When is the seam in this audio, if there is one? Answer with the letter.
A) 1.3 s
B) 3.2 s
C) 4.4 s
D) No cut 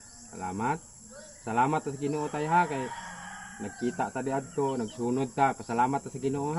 D